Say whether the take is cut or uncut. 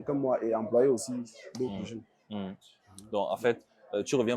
uncut